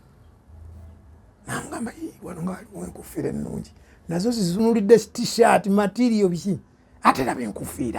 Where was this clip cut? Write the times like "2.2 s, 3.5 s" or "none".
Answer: 4.6 s